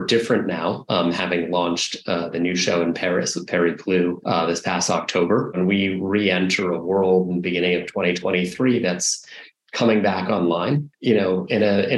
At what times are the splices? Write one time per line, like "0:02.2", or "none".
0:05.6